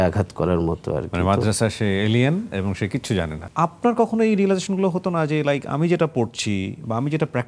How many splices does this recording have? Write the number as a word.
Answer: one